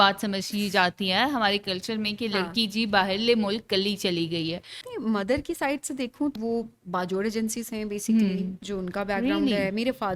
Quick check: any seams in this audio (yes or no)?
yes